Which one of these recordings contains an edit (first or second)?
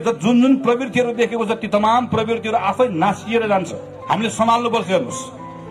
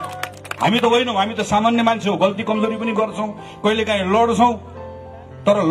first